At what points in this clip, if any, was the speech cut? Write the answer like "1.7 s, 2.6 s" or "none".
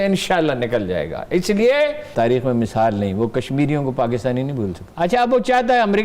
2.0 s, 4.8 s